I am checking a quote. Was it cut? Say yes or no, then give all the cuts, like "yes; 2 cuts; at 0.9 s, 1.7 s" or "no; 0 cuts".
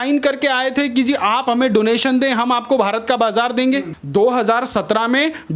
yes; 1 cut; at 3.9 s